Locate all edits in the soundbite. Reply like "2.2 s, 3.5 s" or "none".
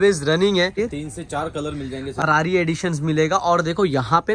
0.7 s, 2.2 s